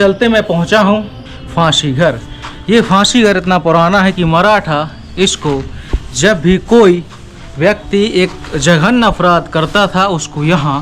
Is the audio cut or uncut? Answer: cut